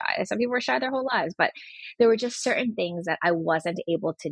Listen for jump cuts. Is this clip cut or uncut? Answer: uncut